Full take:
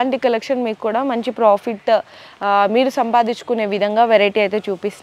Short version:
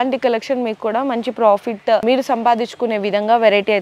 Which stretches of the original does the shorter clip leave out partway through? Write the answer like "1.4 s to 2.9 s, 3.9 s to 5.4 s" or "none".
2.0 s to 2.7 s